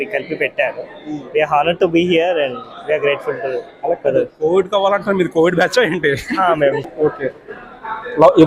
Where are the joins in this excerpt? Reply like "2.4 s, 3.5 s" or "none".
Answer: 6.9 s